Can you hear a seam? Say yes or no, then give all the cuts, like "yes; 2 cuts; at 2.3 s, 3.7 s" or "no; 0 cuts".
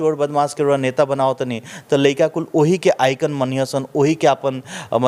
no; 0 cuts